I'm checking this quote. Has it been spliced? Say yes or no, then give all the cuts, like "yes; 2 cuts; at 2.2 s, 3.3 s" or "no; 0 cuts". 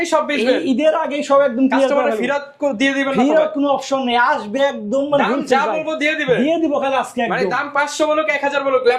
no; 0 cuts